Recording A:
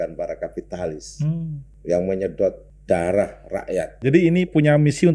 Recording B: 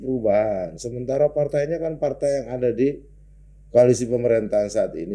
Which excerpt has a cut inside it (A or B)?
A